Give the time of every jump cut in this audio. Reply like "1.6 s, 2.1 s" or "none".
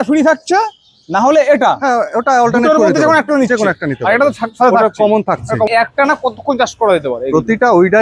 5.7 s